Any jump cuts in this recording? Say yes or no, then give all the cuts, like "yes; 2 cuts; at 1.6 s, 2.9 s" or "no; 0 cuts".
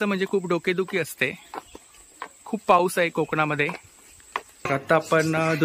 yes; 1 cut; at 4.7 s